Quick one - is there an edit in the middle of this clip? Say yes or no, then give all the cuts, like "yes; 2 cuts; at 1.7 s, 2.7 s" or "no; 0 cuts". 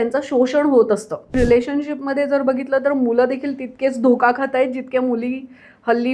yes; 1 cut; at 1.3 s